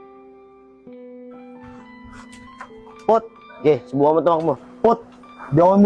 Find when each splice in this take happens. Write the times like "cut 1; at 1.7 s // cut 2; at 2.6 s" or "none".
cut 1; at 2.6 s

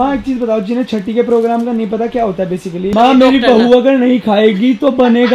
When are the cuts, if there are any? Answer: cut 1; at 2.9 s

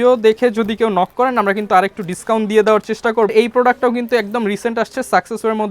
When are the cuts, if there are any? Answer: cut 1; at 3.3 s

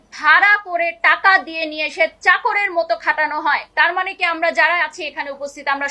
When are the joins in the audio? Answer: cut 1; at 3.7 s

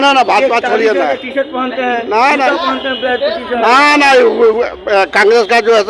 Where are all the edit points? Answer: none

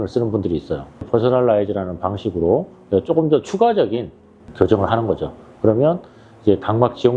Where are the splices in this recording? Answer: cut 1; at 1.0 s

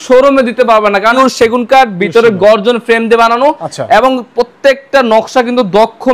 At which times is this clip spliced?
cut 1; at 1.2 s

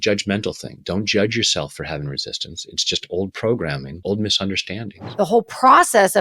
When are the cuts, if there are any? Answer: cut 1; at 3.9 s // cut 2; at 5.0 s

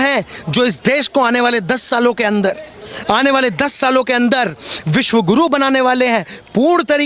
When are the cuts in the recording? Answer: none

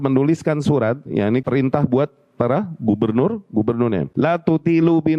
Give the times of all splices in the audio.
cut 1; at 1.4 s // cut 2; at 4.1 s

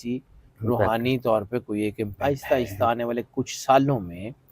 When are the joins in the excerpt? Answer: cut 1; at 2.1 s

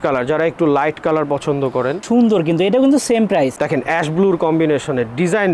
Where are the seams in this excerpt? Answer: cut 1; at 2.0 s // cut 2; at 3.6 s

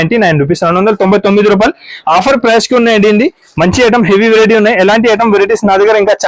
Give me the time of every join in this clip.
none

